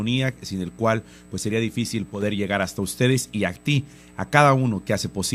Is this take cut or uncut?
cut